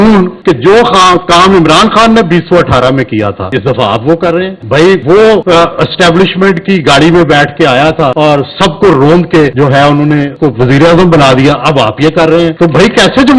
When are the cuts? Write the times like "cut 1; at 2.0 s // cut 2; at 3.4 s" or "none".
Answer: none

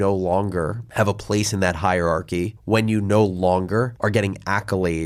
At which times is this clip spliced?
none

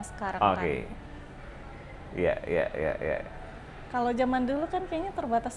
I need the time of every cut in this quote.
none

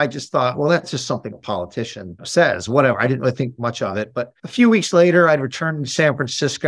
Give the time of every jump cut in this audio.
cut 1; at 1.0 s // cut 2; at 2.3 s // cut 3; at 4.4 s

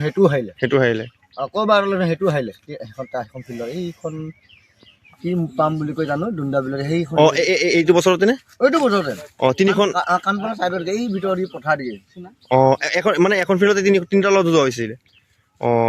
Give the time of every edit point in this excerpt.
none

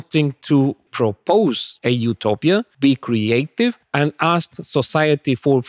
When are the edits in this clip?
cut 1; at 0.9 s // cut 2; at 1.7 s // cut 3; at 2.7 s // cut 4; at 3.8 s

